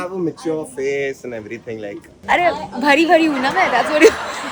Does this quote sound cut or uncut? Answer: uncut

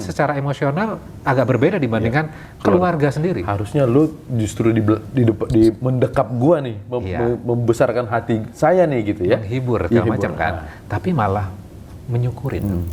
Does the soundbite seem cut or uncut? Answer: uncut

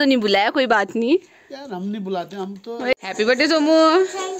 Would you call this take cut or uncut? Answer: cut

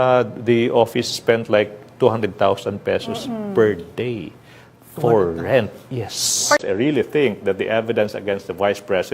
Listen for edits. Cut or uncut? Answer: cut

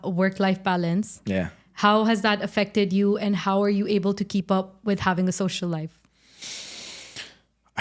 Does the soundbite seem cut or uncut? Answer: uncut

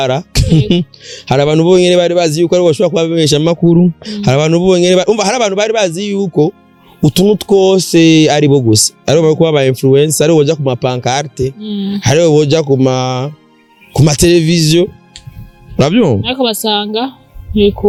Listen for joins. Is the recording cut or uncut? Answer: uncut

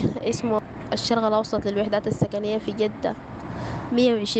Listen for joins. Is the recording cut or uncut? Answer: uncut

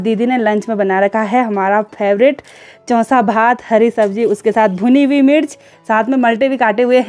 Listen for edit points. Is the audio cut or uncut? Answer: uncut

